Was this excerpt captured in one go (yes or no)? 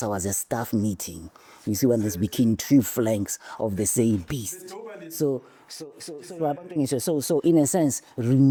yes